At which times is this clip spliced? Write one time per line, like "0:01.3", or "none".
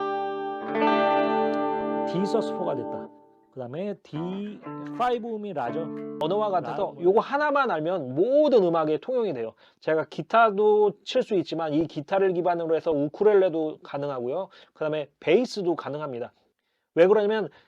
0:06.2